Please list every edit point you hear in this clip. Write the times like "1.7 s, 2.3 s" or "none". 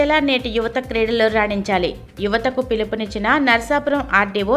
none